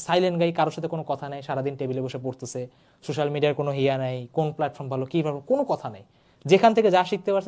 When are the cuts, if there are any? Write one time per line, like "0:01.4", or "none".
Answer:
none